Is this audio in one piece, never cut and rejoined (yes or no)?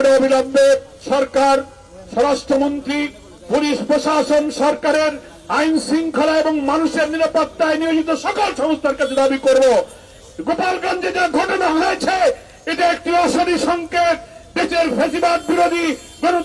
no